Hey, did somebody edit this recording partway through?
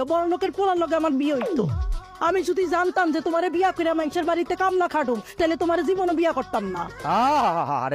no; 0 cuts

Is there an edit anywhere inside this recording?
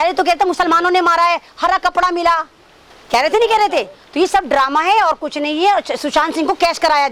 no; 0 cuts

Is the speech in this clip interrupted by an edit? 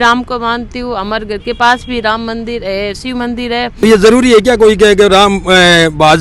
yes; 1 cut; at 3.8 s

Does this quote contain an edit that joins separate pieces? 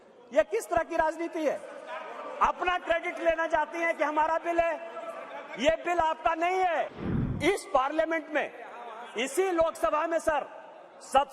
yes; 1 cut; at 7.0 s

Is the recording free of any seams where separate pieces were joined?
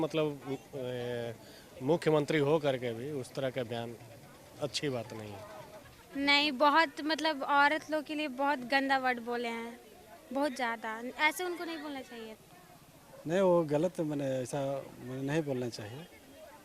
no; 2 cuts; at 6.0 s, 12.4 s

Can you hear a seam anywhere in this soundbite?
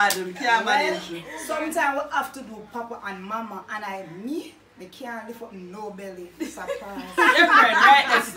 no; 0 cuts

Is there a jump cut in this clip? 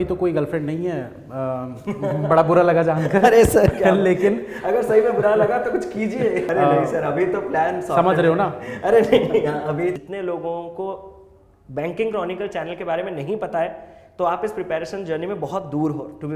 yes; 2 cuts; at 6.4 s, 9.9 s

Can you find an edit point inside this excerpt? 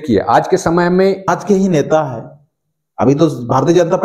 yes; 1 cut; at 1.3 s

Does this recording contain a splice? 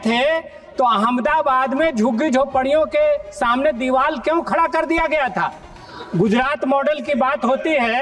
no; 0 cuts

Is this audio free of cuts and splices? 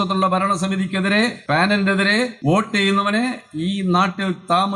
no; 2 cuts; at 1.4 s, 2.3 s

